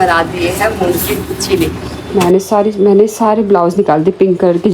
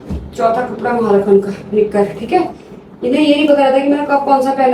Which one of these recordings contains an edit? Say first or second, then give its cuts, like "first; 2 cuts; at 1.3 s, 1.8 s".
first; 1 cut; at 1.9 s